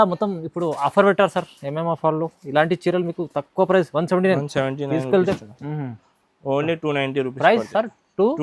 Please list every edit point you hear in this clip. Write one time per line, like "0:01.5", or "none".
0:05.2